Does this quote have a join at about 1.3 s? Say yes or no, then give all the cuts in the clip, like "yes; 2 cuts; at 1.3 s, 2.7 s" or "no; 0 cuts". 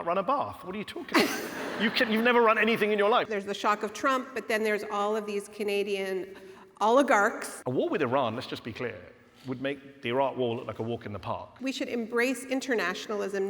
no; 3 cuts; at 3.3 s, 7.5 s, 11.5 s